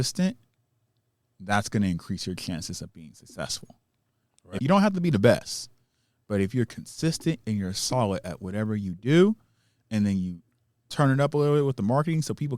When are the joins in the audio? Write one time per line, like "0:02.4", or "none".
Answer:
0:04.6